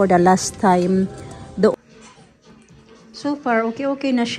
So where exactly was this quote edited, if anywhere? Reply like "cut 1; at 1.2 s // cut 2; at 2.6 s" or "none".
cut 1; at 1.7 s

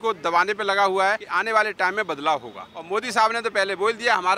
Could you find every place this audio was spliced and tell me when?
cut 1; at 1.3 s // cut 2; at 2.7 s

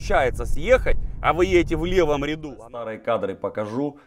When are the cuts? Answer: cut 1; at 2.5 s

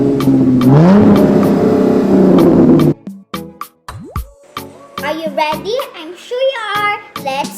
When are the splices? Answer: cut 1; at 5.0 s

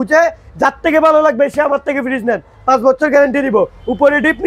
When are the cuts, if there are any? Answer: none

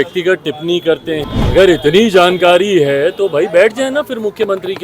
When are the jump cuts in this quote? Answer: cut 1; at 1.2 s

